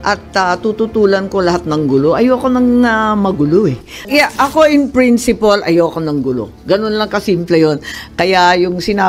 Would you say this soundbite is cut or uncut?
cut